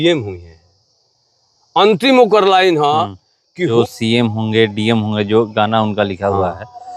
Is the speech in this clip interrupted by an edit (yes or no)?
yes